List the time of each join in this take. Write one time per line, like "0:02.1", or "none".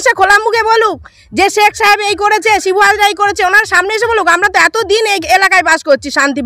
none